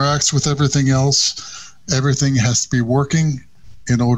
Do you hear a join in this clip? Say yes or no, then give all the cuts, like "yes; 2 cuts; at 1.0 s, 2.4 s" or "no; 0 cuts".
no; 0 cuts